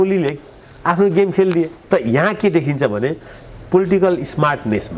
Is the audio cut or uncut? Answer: cut